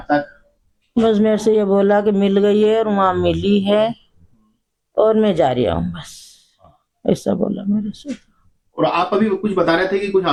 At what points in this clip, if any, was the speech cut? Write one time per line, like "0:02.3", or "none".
none